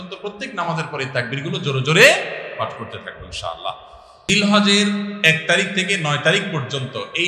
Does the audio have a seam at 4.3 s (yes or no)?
yes